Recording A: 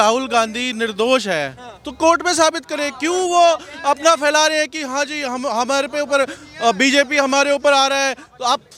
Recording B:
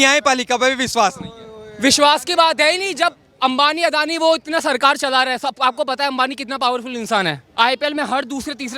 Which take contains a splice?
B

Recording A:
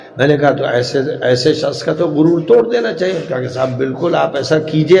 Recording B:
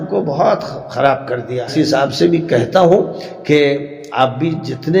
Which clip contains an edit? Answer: B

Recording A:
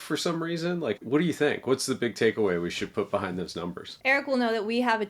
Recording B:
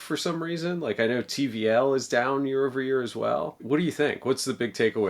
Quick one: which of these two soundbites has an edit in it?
A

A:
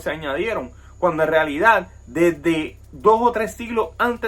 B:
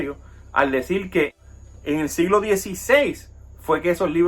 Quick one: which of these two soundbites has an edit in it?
B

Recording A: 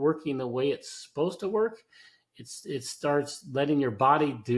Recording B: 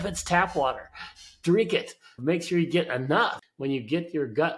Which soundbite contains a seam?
B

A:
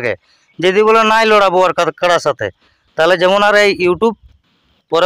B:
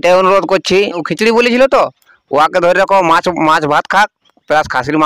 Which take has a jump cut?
B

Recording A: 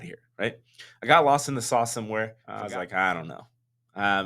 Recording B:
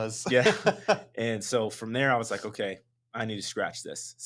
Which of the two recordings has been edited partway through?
A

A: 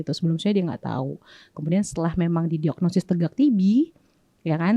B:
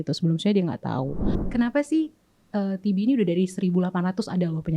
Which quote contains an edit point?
B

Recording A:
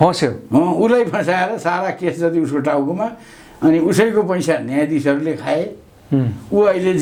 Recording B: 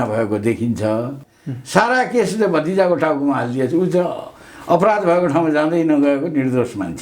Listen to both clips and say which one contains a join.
B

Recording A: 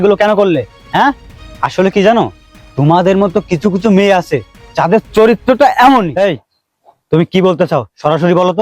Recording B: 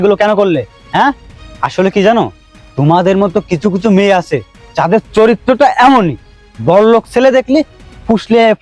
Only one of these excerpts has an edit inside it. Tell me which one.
A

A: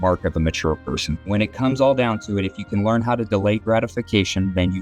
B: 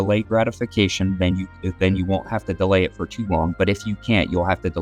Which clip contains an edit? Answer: A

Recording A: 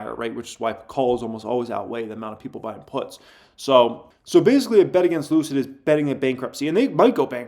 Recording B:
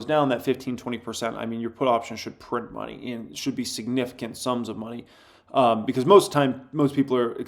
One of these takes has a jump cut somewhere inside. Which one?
A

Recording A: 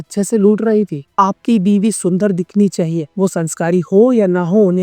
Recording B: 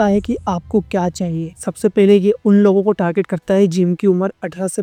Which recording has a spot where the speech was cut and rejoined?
A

